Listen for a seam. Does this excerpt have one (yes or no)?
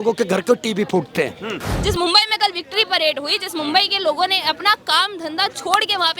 yes